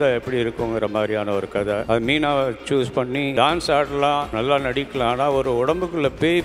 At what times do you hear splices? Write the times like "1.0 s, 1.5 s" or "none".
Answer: 1.8 s, 3.3 s, 4.3 s